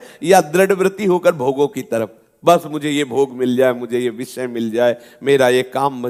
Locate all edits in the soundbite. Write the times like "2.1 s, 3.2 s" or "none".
none